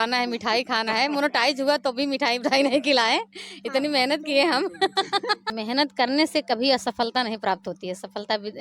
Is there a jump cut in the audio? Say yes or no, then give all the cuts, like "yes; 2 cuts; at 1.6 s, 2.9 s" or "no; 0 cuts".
yes; 1 cut; at 5.5 s